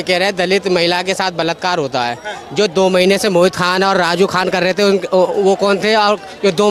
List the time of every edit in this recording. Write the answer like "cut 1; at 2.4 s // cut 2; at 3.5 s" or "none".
none